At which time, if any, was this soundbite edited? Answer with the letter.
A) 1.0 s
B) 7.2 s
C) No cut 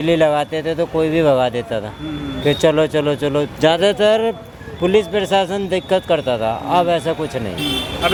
C